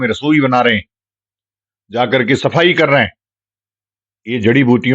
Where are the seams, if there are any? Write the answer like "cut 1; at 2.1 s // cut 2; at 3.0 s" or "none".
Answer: none